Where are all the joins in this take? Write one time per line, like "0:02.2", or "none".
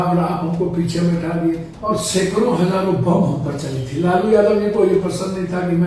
0:01.7